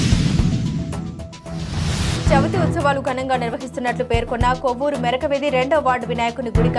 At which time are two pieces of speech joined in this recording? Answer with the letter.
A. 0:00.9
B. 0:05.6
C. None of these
A